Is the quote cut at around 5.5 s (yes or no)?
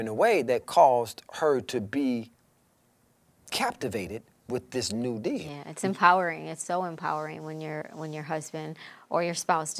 yes